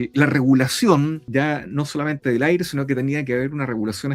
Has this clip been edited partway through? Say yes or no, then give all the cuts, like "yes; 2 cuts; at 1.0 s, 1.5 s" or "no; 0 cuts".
yes; 1 cut; at 1.2 s